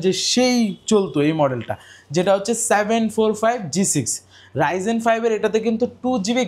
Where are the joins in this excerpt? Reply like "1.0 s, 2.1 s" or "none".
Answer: none